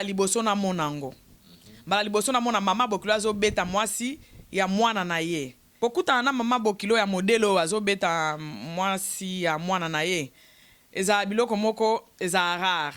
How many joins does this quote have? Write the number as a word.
one